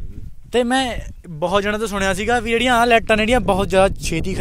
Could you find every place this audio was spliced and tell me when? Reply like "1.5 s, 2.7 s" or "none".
none